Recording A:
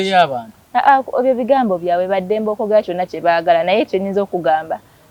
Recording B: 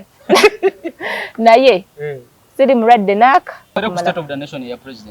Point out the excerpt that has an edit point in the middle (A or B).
B